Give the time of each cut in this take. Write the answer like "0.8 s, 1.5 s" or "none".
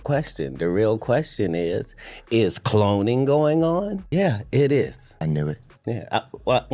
4.0 s, 5.0 s